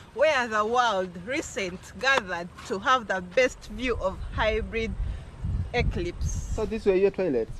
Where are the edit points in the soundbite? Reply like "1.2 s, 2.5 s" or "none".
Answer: 6.5 s